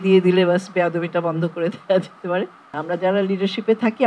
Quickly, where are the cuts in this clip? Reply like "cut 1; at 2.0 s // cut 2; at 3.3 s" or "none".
cut 1; at 2.7 s